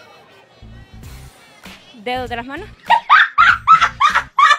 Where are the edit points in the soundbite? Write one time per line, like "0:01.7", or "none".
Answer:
none